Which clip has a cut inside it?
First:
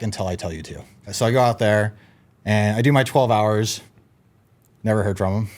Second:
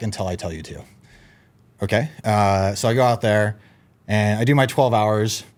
first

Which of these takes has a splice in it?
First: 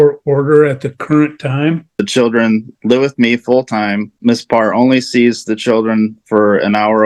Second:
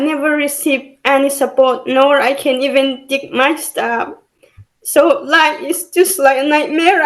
first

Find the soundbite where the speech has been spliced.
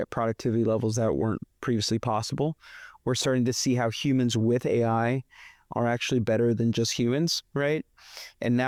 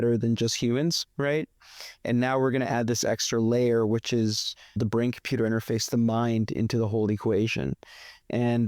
second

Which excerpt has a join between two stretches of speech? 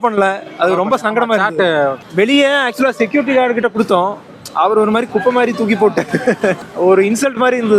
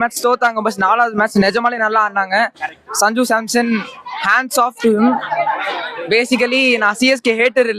first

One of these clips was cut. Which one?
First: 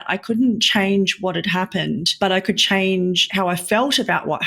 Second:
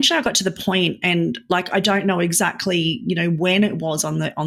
first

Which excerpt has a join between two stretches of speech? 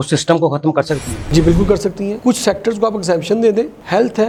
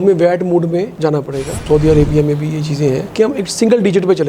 second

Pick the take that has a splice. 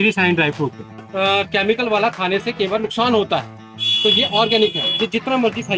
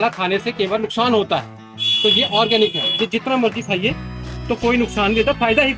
first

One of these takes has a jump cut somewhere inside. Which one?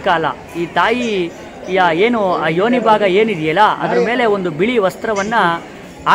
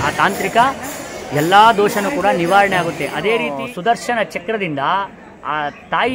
second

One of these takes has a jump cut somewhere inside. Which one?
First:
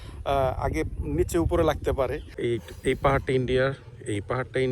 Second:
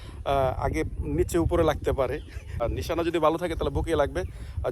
first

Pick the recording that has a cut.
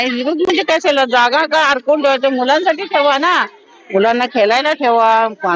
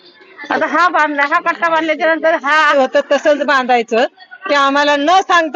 second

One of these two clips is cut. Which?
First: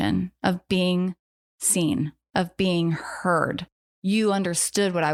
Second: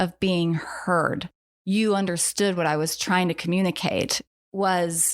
second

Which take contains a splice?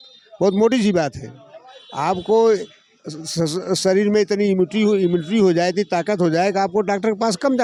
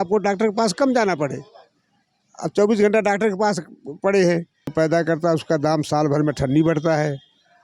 second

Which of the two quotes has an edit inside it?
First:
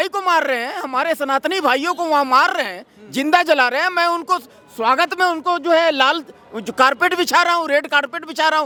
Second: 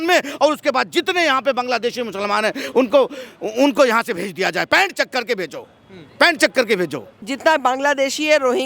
second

